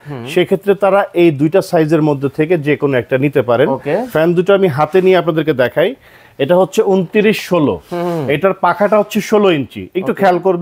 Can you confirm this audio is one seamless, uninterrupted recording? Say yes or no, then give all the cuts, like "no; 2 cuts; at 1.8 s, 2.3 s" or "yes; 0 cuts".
yes; 0 cuts